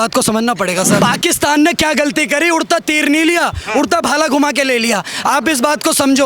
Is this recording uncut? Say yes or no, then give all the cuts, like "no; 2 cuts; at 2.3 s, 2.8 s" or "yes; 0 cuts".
no; 1 cut; at 1.0 s